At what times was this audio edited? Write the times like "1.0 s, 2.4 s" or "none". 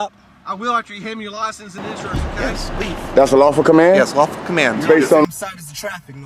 1.8 s, 5.2 s